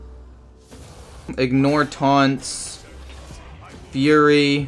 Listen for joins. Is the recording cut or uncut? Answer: cut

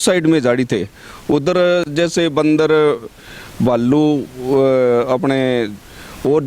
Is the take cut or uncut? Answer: uncut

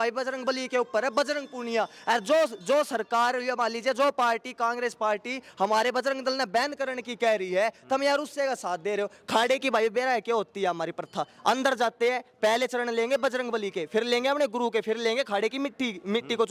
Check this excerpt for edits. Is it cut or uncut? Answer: uncut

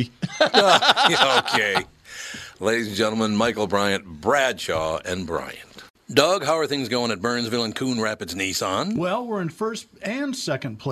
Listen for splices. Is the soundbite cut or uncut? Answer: cut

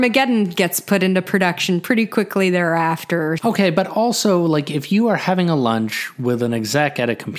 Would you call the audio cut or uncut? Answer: cut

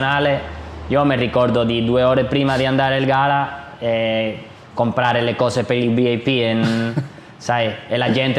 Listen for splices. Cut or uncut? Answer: uncut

